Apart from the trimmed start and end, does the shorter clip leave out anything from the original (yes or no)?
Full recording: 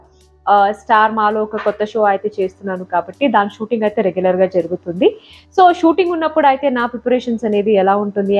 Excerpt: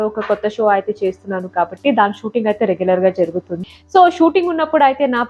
yes